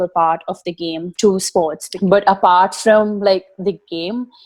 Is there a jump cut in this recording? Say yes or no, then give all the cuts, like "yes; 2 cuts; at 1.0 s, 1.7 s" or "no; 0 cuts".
yes; 1 cut; at 1.9 s